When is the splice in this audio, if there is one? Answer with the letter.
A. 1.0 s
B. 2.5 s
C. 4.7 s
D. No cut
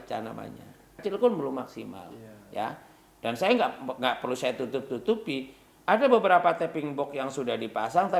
A